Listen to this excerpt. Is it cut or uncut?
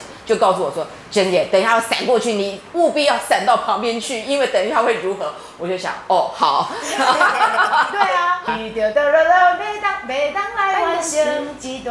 cut